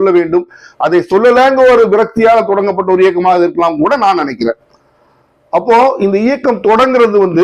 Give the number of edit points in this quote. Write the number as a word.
zero